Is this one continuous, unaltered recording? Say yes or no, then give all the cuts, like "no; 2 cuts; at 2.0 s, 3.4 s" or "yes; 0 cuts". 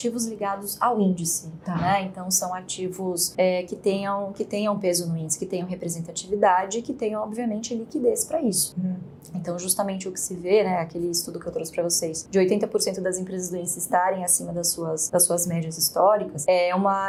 yes; 0 cuts